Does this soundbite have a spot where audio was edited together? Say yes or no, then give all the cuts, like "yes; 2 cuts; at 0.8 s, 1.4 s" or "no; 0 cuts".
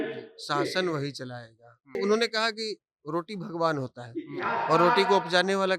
yes; 1 cut; at 2.0 s